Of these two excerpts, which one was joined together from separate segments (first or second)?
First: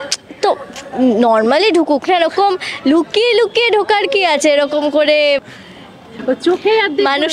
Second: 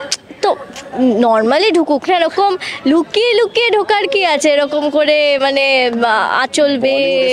first